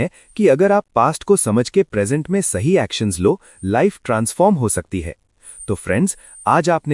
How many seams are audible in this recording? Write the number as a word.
zero